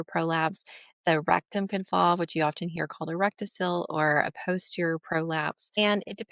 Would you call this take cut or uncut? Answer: uncut